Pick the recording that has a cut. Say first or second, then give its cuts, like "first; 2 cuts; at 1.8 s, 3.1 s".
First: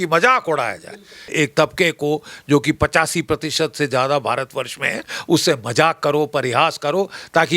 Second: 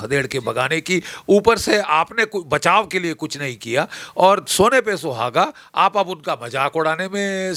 first; 1 cut; at 1.3 s